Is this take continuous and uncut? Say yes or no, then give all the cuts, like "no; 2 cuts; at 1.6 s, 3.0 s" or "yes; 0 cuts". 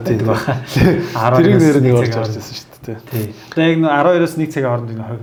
yes; 0 cuts